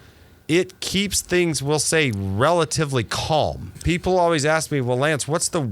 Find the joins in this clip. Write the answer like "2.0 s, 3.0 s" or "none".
3.7 s